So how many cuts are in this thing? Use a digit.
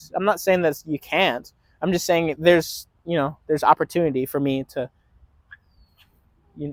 0